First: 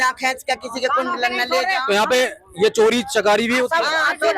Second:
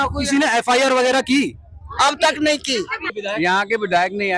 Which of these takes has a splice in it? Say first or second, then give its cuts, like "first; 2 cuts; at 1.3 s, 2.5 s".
second; 1 cut; at 3.1 s